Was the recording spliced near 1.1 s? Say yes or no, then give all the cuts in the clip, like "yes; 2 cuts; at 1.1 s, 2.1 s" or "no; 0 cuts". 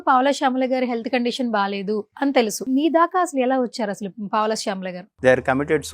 no; 2 cuts; at 2.6 s, 5.0 s